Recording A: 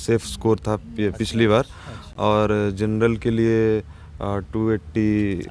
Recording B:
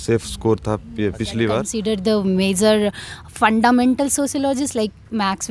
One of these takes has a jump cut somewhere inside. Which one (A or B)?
B